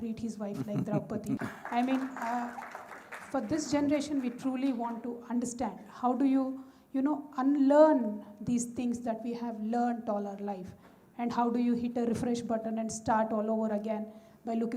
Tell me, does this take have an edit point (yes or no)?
no